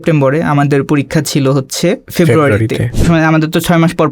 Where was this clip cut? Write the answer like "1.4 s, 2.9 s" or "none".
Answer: 2.1 s, 3.0 s